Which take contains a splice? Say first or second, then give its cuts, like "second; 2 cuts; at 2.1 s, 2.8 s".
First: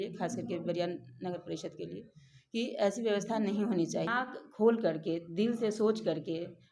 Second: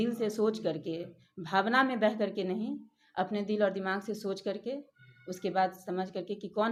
first; 1 cut; at 4.4 s